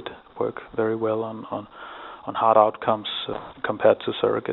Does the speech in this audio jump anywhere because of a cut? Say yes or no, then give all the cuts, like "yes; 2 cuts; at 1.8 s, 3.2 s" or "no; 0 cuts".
yes; 1 cut; at 3.1 s